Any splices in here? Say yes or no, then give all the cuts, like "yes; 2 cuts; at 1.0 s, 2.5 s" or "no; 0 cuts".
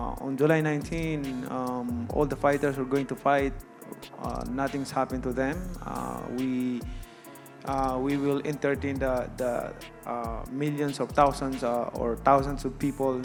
no; 0 cuts